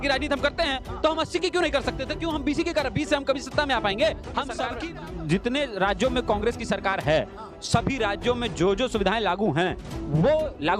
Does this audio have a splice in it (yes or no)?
yes